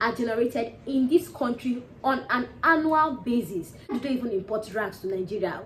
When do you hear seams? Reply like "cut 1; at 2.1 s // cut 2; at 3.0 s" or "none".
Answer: cut 1; at 4.0 s